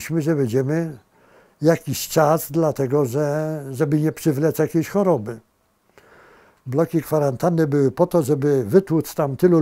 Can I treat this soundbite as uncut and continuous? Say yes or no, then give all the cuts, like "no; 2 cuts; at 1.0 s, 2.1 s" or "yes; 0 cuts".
yes; 0 cuts